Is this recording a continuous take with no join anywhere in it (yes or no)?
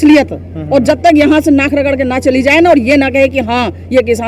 yes